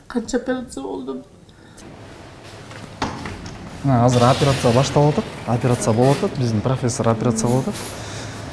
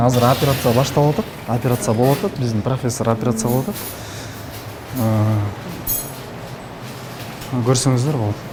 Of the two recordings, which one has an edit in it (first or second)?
first